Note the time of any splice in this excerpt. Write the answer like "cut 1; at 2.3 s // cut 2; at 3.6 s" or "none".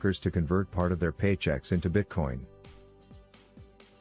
cut 1; at 2.5 s